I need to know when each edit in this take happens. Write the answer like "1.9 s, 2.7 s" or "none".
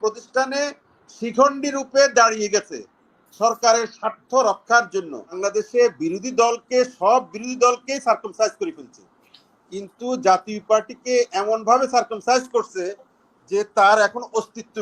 5.4 s